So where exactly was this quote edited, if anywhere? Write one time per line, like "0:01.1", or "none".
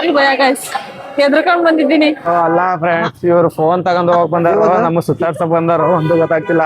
0:02.3